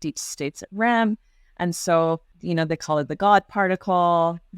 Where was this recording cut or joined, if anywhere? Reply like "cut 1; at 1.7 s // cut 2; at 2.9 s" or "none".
cut 1; at 2.3 s